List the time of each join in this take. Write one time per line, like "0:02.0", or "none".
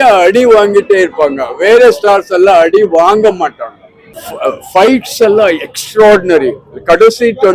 0:04.3